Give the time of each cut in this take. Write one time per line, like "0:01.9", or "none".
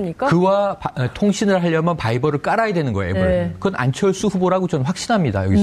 0:02.0